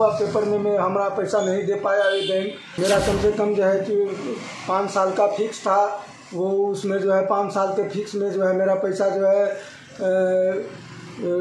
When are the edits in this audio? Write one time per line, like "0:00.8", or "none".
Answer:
0:02.7